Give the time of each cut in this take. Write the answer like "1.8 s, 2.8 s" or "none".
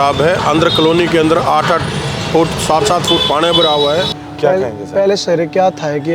4.2 s